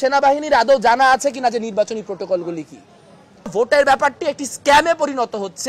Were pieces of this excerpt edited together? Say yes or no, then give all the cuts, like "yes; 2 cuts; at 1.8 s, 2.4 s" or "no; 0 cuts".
yes; 1 cut; at 3.5 s